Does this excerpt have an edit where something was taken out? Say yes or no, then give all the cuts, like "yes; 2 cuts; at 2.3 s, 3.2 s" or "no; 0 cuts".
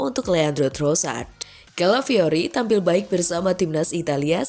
yes; 1 cut; at 1.3 s